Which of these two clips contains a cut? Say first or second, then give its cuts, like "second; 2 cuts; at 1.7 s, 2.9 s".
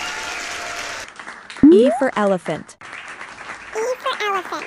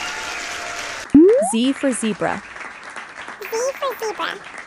first; 1 cut; at 1.1 s